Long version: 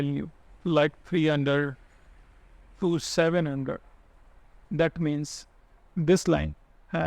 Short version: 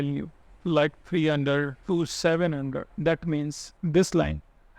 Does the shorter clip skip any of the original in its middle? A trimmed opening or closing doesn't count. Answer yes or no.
yes